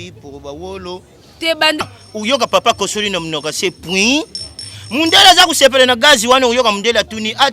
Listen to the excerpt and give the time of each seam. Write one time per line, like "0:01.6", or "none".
0:01.8